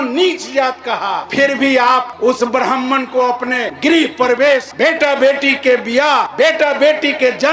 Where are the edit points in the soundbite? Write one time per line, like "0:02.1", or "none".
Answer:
0:01.2
0:02.1
0:03.7
0:04.7
0:06.3